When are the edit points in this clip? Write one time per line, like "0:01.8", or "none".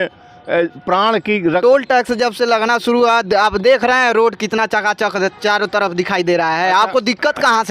0:01.5